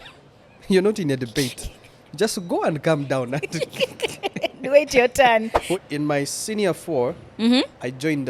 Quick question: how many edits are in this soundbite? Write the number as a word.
one